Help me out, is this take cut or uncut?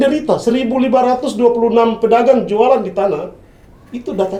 uncut